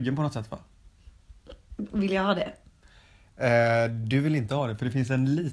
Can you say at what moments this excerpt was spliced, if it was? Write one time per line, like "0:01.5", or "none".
none